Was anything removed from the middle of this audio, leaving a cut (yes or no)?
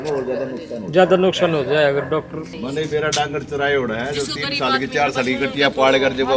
yes